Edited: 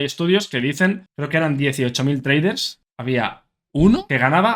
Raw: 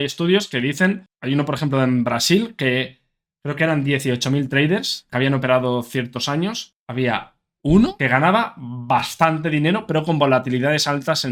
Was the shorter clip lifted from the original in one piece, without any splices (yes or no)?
no